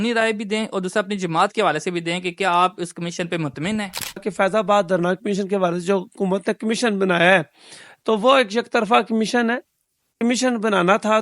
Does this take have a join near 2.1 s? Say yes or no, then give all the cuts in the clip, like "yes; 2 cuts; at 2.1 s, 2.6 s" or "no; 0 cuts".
no; 1 cut; at 4.3 s